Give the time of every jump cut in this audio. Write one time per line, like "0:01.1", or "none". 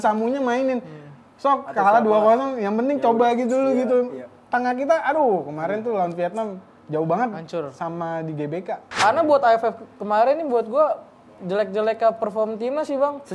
0:08.9